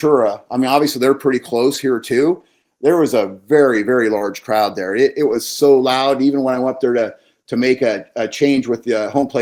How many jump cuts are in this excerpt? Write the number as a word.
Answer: zero